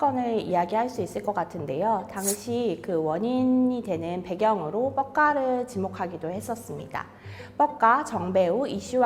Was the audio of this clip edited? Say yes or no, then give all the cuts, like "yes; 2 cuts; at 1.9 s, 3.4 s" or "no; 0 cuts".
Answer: no; 0 cuts